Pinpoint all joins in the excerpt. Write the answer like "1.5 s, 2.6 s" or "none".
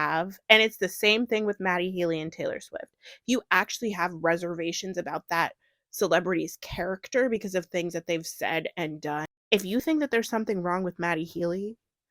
9.3 s